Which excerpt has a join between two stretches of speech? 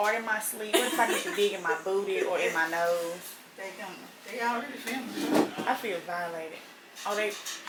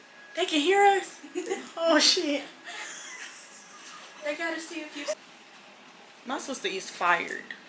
second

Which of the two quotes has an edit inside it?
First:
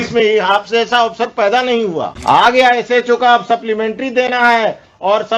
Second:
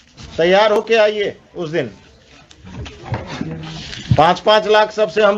first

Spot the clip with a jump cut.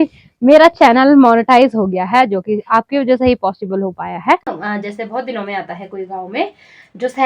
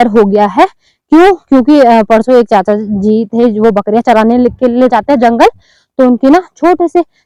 first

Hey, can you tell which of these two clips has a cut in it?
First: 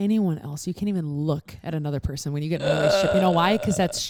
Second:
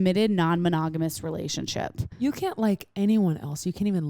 second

